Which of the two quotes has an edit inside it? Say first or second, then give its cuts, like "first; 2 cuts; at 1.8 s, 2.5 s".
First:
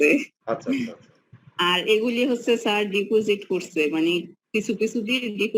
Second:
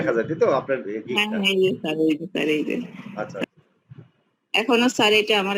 second; 1 cut; at 3.5 s